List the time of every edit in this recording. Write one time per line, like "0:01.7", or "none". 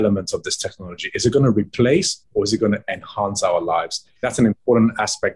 0:04.3